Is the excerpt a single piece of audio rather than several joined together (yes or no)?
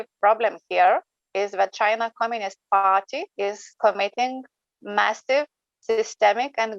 no